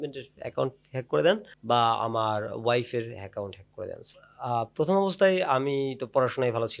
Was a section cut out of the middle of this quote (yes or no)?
yes